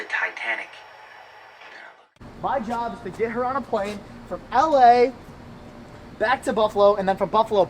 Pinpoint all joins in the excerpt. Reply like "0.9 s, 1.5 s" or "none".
2.0 s